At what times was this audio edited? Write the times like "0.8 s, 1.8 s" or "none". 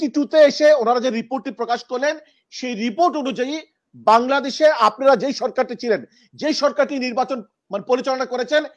none